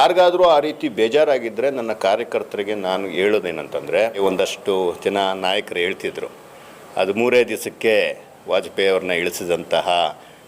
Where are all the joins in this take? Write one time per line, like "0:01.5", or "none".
0:04.2